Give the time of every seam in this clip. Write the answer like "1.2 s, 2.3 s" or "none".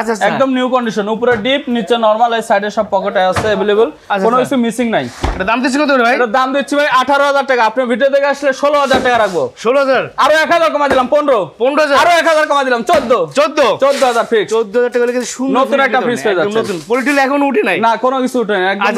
none

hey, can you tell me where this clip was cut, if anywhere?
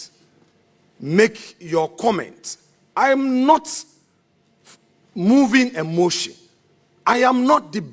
none

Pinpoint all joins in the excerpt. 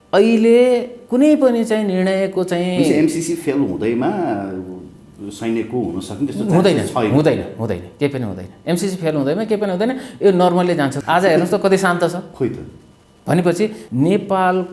11.0 s, 12.3 s, 13.8 s

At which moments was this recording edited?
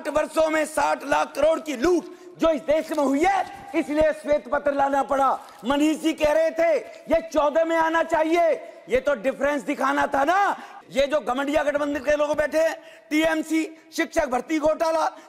10.7 s

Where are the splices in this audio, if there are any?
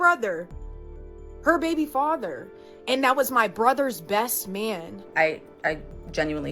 2.7 s, 5.1 s

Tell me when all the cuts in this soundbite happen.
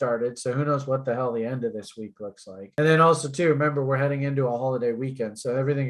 none

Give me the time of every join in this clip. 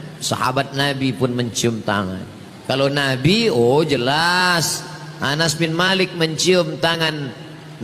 none

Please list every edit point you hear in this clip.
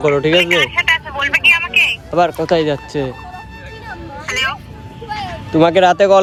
none

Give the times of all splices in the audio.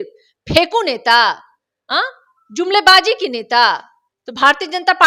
none

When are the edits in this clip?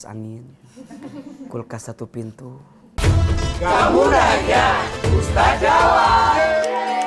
2.8 s

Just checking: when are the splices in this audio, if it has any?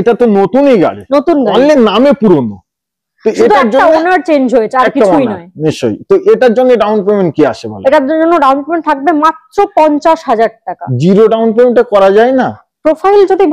none

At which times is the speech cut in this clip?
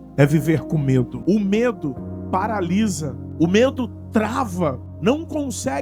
1.1 s, 3.2 s, 4.9 s

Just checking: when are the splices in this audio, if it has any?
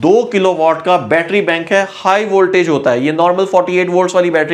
none

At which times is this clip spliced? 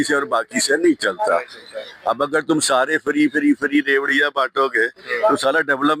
none

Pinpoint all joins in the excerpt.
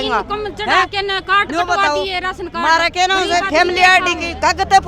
none

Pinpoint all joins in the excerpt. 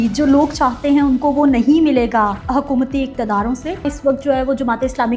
2.4 s, 3.8 s

